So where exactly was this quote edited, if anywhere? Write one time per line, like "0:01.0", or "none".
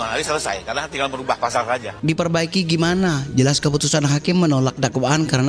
0:01.9